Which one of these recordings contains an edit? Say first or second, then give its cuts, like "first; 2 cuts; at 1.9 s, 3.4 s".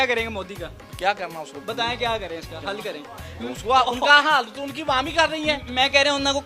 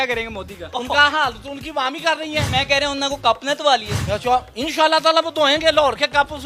second; 2 cuts; at 0.7 s, 2.5 s